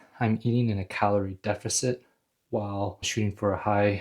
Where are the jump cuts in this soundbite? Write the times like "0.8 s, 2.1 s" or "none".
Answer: 3.1 s

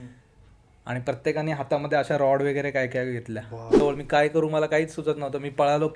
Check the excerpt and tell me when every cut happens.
3.8 s

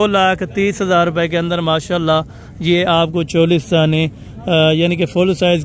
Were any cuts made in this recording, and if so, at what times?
none

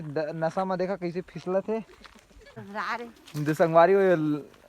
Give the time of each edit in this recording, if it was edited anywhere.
2.4 s

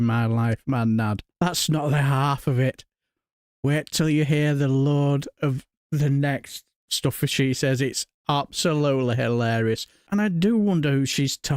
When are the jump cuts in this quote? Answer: none

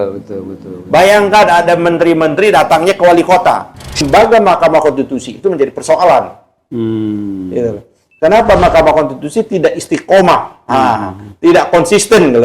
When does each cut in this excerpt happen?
4.0 s

